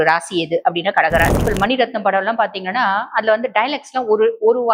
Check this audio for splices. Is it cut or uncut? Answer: cut